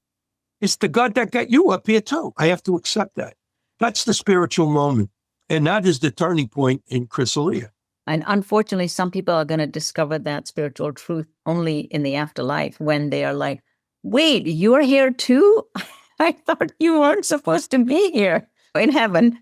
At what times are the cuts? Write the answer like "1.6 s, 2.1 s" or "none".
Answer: none